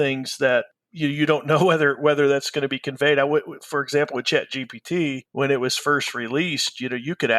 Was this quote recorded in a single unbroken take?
no; 1 cut; at 5.2 s

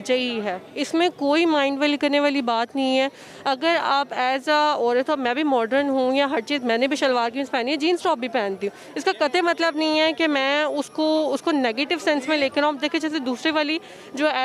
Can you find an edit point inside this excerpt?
no; 0 cuts

